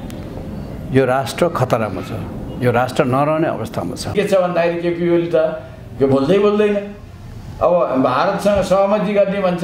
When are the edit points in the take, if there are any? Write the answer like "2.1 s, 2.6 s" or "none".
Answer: 4.1 s